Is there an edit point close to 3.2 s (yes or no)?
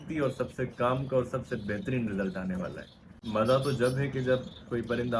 yes